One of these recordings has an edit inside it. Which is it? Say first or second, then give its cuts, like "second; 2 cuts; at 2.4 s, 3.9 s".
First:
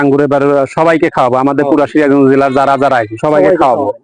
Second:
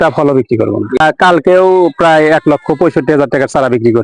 second; 1 cut; at 1.0 s